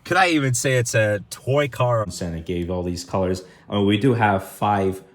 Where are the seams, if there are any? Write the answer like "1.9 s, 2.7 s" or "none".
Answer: 2.0 s